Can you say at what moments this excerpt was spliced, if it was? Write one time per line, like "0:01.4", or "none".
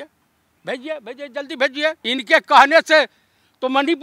0:02.0